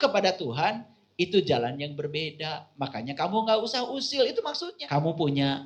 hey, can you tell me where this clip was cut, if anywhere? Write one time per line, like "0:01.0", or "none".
0:04.7